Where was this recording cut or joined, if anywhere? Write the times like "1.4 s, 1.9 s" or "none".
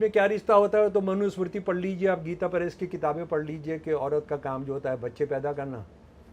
none